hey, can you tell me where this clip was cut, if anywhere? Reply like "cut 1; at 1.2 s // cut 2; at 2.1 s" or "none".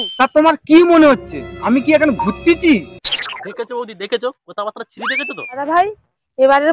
cut 1; at 5.6 s